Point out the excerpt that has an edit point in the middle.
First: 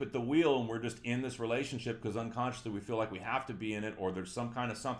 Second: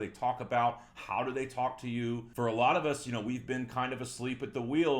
second; 1 cut; at 2.3 s

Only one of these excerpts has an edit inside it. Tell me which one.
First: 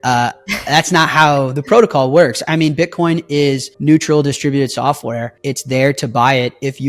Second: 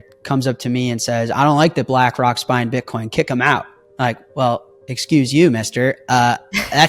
first; 2 cuts; at 3.7 s, 5.4 s

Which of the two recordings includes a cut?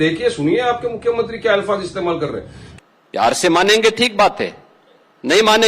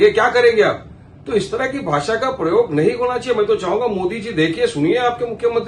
first; 1 cut; at 2.6 s

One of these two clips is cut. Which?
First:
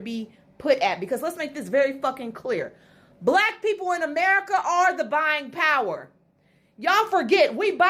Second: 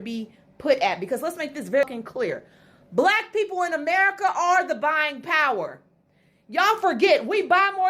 second; 1 cut; at 1.8 s

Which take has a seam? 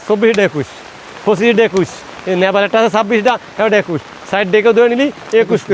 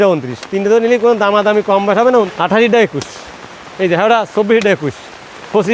second; 1 cut; at 2.3 s

